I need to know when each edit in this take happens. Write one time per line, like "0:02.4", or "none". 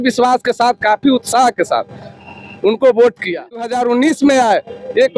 0:03.7